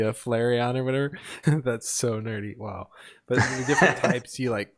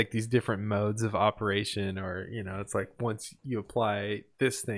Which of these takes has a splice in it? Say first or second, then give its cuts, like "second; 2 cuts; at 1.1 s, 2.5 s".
first; 1 cut; at 1.3 s